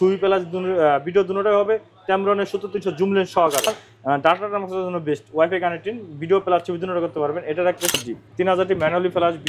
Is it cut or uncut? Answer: cut